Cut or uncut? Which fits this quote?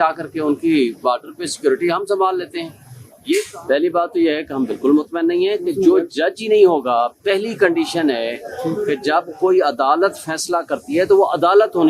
cut